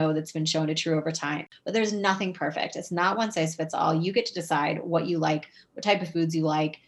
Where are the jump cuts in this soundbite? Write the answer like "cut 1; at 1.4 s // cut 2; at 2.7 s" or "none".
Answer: cut 1; at 1.5 s